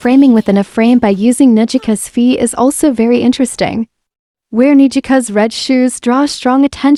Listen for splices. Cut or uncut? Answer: uncut